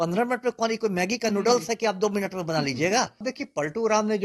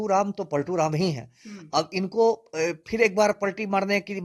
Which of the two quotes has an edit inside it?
first; 1 cut; at 3.2 s

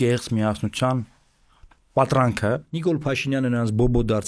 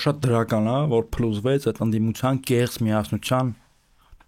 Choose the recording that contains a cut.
first; 1 cut; at 2.7 s

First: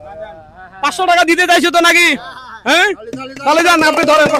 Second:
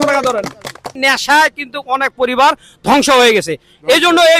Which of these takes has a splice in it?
second; 1 cut; at 1.0 s

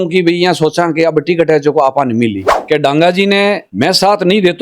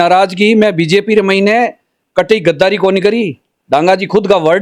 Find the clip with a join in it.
first; 2 cuts; at 2.5 s, 3.7 s

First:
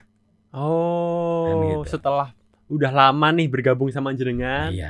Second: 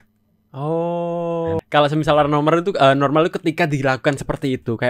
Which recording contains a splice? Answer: second; 1 cut; at 1.6 s

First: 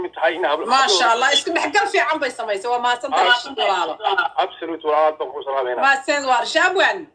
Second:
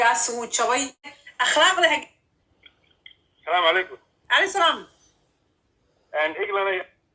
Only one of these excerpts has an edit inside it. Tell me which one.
second; 1 cut; at 1.2 s

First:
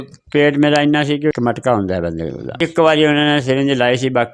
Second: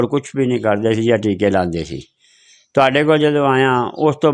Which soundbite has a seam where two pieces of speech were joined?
first; 2 cuts; at 1.3 s, 2.5 s

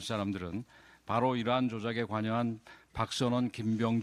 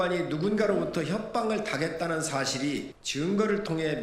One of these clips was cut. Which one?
second; 1 cut; at 3.0 s

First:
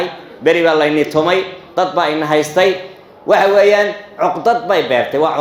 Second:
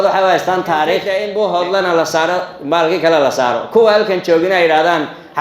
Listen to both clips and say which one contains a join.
second; 1 cut; at 1.2 s

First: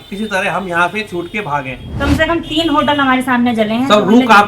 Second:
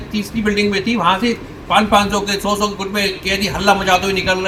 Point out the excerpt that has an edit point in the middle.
first; 1 cut; at 1.9 s

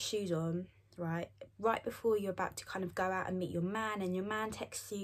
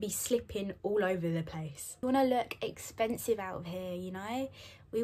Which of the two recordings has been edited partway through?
second; 1 cut; at 2.0 s

